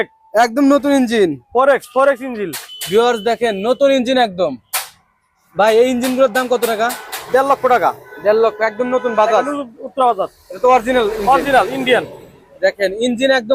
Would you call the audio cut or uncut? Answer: uncut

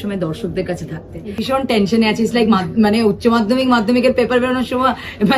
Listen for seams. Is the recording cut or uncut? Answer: cut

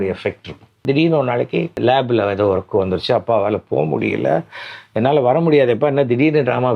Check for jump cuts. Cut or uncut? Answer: cut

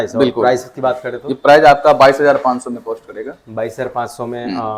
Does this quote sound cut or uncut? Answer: uncut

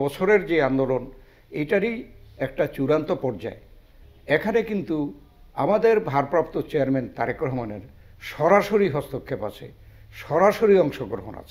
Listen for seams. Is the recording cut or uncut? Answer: uncut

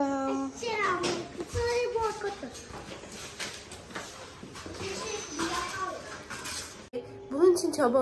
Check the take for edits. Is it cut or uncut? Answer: cut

